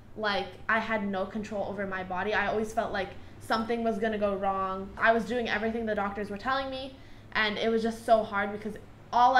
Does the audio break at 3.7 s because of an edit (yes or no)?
no